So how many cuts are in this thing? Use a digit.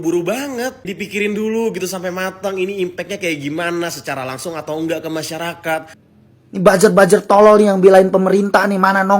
1